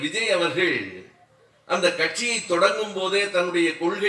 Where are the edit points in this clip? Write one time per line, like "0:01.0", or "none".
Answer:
none